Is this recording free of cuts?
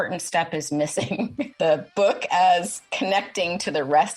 no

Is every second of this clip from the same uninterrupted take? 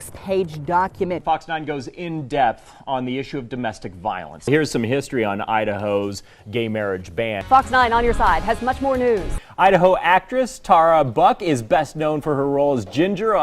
no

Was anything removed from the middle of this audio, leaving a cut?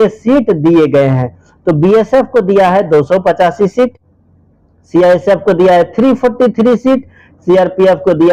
no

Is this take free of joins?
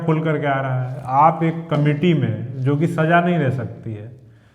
yes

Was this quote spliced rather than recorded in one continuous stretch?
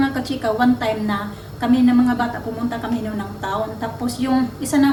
no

